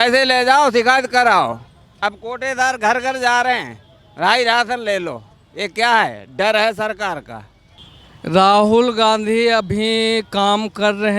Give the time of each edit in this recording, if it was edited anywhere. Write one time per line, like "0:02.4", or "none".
0:07.7

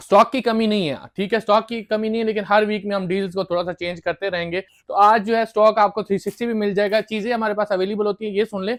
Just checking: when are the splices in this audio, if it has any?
none

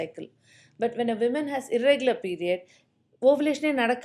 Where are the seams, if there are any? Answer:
none

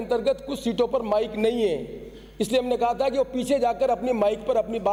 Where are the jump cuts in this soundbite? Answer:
none

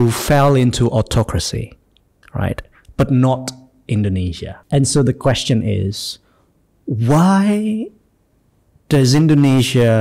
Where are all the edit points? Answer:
0:04.5

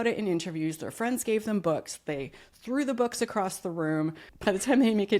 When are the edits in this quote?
0:04.3

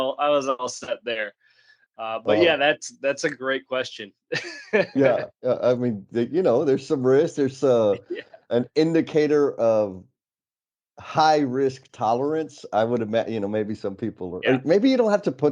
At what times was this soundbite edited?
none

